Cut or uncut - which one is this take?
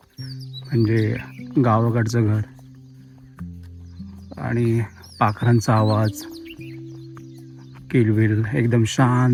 uncut